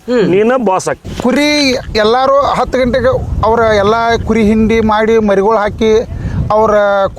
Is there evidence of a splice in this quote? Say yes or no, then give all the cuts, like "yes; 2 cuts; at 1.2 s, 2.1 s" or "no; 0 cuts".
yes; 1 cut; at 1.1 s